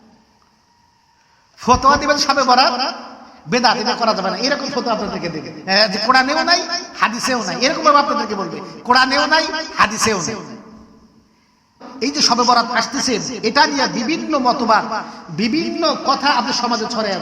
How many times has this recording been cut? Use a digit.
1